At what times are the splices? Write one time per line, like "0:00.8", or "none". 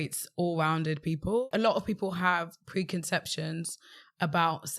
0:01.4